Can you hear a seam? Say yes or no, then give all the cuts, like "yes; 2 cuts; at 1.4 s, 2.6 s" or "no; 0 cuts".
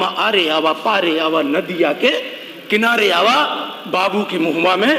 no; 0 cuts